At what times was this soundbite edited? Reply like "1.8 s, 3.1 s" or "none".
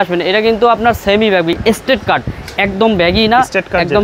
none